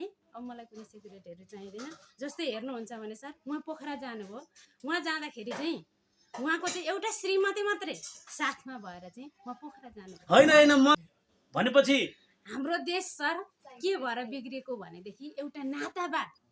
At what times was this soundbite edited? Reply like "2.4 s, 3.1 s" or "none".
10.9 s